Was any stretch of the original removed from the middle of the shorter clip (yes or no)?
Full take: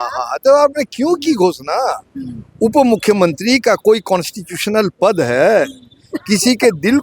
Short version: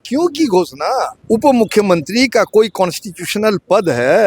yes